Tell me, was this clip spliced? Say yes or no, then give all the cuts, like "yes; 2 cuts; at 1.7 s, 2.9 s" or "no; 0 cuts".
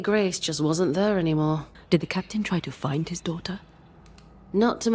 yes; 1 cut; at 1.7 s